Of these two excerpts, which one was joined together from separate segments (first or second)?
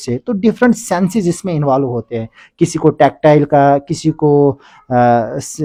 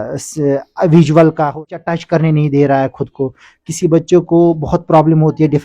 second